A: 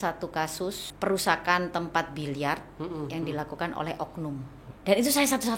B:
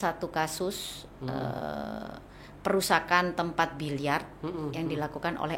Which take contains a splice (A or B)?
A